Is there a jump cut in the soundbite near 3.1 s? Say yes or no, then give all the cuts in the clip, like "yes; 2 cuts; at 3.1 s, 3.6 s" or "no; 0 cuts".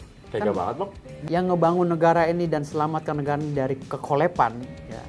no; 1 cut; at 1.2 s